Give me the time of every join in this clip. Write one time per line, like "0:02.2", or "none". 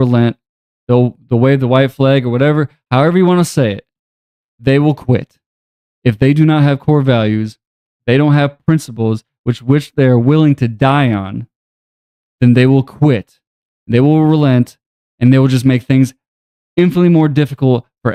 none